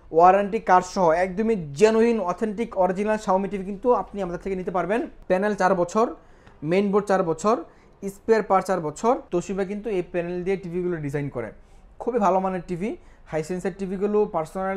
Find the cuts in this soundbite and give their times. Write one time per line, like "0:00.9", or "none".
0:05.2
0:09.2